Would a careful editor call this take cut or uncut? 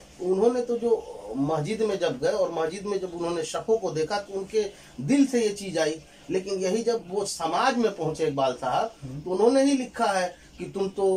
uncut